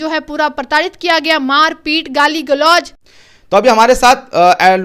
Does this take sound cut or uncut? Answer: uncut